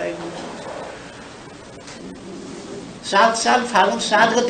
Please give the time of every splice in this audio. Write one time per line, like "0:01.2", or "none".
0:01.9